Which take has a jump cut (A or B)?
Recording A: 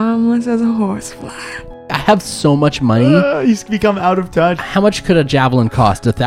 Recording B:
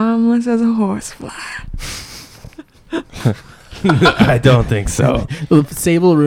A